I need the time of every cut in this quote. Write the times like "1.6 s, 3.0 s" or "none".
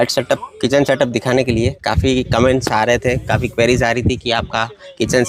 none

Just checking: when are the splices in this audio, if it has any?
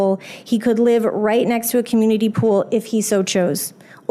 none

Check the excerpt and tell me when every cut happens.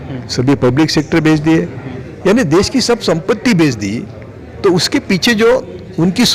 none

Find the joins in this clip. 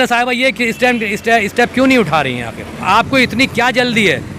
2.8 s

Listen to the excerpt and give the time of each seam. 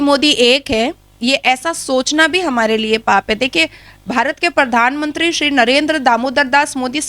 none

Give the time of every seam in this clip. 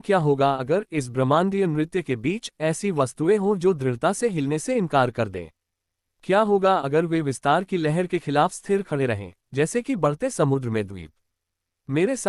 none

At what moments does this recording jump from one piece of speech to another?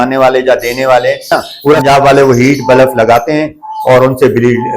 1.8 s

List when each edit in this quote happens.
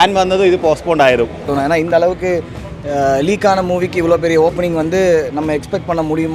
1.5 s

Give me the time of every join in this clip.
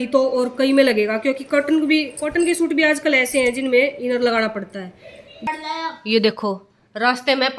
5.5 s

